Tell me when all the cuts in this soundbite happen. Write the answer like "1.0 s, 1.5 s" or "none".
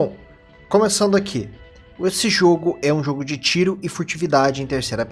1.1 s